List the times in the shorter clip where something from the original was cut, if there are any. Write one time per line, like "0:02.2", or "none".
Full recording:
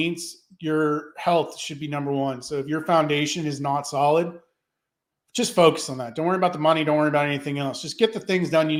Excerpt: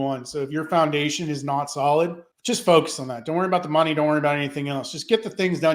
0:02.3